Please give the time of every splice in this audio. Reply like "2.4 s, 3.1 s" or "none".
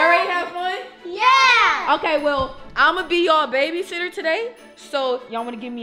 none